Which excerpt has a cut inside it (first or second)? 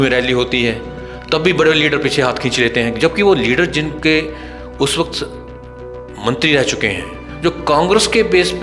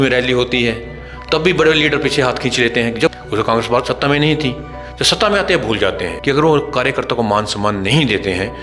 second